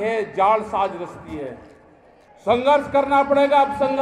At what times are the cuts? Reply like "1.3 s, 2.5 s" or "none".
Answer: 2.2 s